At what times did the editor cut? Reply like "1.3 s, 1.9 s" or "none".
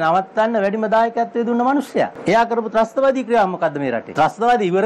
2.2 s, 4.1 s